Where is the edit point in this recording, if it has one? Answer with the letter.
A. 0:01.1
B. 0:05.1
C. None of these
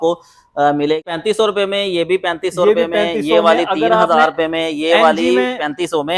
A